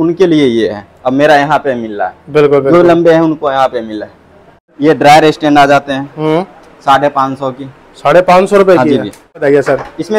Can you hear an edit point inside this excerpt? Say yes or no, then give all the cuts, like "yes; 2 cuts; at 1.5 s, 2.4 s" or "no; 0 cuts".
yes; 2 cuts; at 4.8 s, 9.4 s